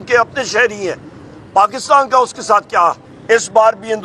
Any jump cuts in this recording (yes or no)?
yes